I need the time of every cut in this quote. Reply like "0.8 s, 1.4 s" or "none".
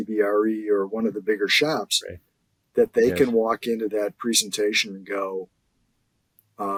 none